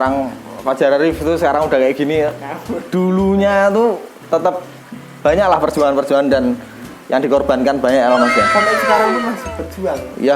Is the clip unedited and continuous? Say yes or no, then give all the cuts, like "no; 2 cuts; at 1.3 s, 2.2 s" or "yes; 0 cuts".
yes; 0 cuts